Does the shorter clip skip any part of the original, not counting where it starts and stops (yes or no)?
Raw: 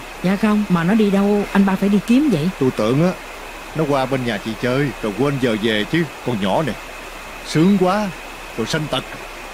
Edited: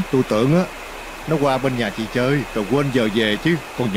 no